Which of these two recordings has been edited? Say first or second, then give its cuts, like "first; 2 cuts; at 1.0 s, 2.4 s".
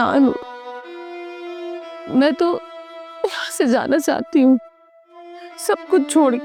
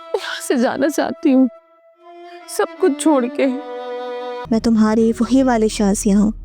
second; 1 cut; at 4.3 s